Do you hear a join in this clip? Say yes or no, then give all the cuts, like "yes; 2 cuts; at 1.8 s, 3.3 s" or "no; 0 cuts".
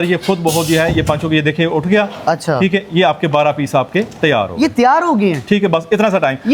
no; 0 cuts